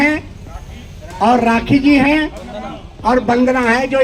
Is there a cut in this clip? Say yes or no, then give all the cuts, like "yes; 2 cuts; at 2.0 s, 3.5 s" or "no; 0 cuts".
no; 0 cuts